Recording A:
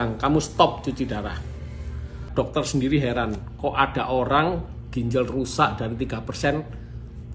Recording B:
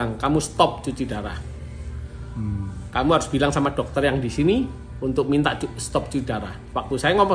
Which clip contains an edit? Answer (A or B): A